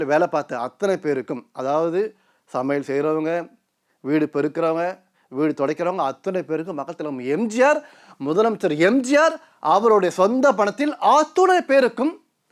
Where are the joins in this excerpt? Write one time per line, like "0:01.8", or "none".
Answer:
none